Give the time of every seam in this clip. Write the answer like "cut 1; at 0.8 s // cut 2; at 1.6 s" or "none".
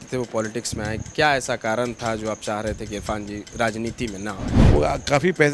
cut 1; at 4.5 s